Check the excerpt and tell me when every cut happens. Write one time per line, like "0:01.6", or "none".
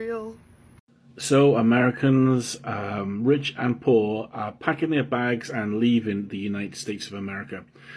0:01.0